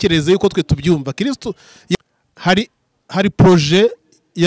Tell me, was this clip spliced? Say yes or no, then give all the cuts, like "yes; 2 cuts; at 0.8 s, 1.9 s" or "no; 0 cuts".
yes; 1 cut; at 2.0 s